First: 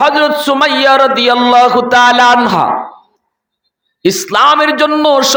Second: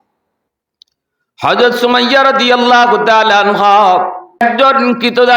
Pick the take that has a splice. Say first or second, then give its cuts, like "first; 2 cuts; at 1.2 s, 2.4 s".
second; 1 cut; at 4.4 s